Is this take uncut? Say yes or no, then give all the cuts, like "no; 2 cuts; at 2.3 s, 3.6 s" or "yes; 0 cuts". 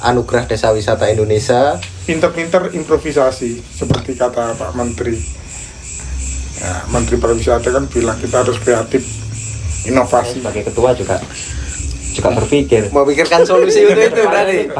no; 2 cuts; at 1.9 s, 10.5 s